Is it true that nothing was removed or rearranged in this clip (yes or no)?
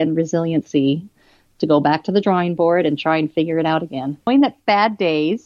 no